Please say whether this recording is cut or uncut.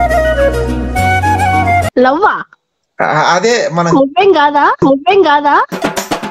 cut